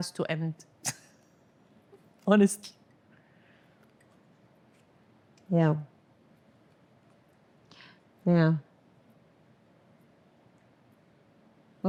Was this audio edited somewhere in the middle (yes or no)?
no